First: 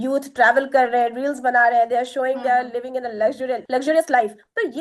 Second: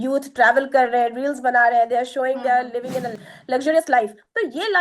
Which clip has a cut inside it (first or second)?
second